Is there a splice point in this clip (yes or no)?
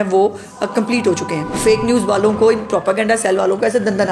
yes